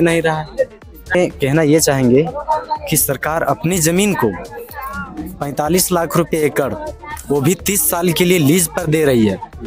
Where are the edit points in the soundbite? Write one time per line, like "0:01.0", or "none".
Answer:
0:01.1